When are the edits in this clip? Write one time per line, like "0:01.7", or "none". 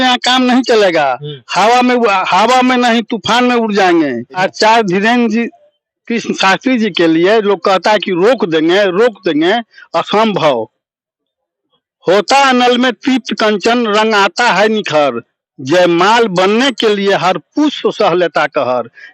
0:04.4

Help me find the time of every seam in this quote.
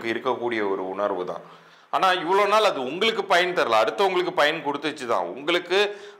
none

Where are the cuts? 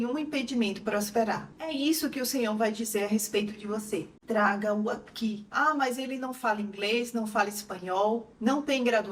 none

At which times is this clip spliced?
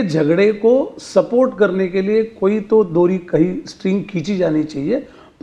none

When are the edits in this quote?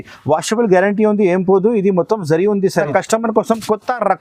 0:02.9

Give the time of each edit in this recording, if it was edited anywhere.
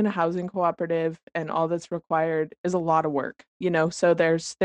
0:03.4

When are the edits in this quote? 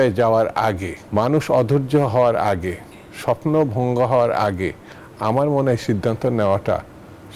none

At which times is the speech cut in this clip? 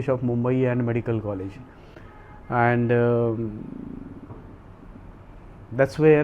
none

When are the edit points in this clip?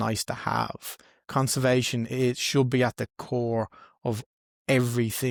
none

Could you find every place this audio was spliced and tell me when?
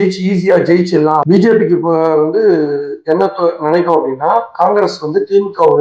0:01.2

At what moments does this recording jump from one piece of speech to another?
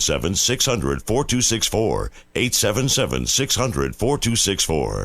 0:02.2

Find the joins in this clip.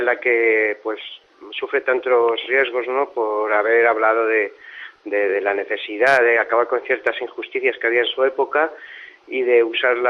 0:03.3

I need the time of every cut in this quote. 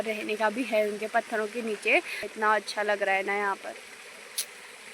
0:02.3

